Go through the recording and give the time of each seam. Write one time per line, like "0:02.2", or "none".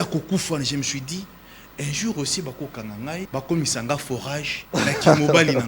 0:03.3
0:04.5